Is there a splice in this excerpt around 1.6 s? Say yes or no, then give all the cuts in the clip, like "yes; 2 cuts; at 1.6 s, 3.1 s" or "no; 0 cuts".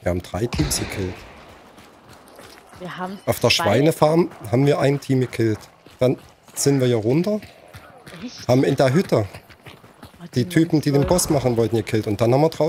no; 0 cuts